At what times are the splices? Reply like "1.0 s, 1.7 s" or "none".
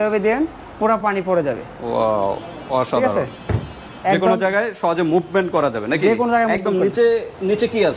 none